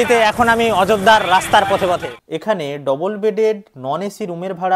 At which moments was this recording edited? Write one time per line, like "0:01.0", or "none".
0:02.1